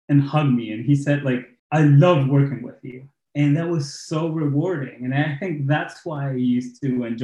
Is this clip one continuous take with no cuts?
no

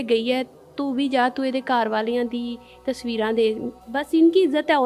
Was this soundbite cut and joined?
yes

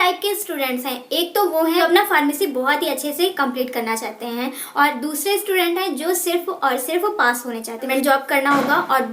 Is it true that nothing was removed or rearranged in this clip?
no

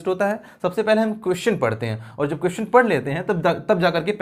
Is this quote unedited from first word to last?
yes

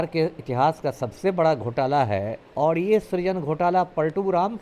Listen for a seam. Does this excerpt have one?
yes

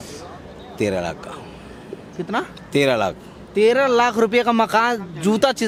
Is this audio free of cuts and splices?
yes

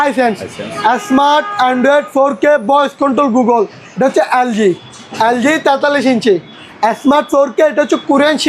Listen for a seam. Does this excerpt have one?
yes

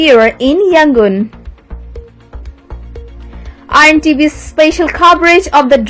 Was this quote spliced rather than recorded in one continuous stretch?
yes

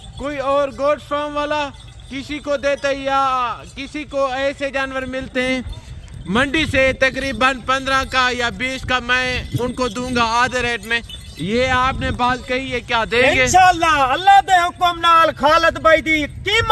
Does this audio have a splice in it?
no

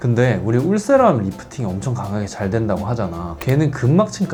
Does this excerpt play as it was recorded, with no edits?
yes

